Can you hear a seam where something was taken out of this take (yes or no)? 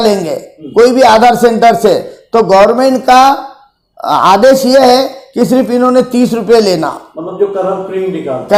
no